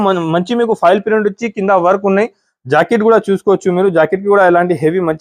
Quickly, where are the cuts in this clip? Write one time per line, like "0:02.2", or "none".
none